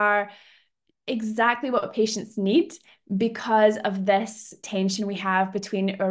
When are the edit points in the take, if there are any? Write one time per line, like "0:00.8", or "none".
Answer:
0:04.6